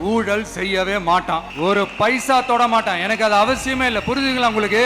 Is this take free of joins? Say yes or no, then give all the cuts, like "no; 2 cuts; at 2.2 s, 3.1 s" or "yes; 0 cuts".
no; 1 cut; at 1.5 s